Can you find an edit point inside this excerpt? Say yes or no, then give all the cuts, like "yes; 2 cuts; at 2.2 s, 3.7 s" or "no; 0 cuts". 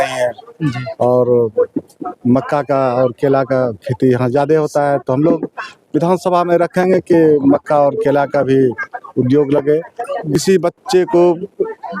yes; 1 cut; at 10.3 s